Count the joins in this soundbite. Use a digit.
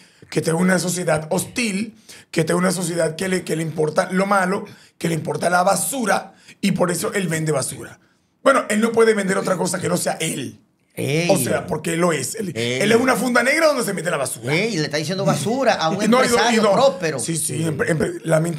0